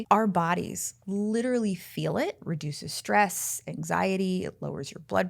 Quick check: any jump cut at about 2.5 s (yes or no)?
yes